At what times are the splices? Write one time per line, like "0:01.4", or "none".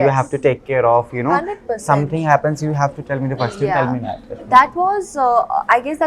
none